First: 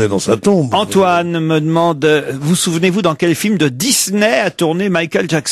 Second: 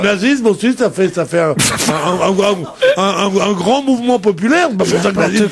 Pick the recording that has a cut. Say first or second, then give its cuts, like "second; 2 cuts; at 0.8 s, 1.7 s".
second; 1 cut; at 2.1 s